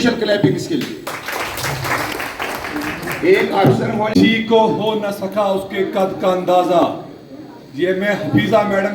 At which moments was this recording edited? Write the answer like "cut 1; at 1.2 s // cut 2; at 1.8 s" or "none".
cut 1; at 4.3 s

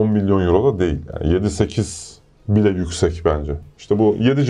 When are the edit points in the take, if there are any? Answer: none

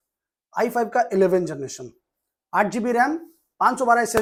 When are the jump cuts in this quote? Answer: none

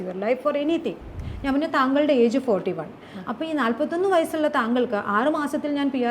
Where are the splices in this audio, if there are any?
cut 1; at 1.1 s

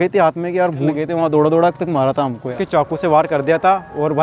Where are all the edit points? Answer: cut 1; at 0.9 s // cut 2; at 2.5 s

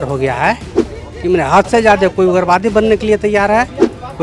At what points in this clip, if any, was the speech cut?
none

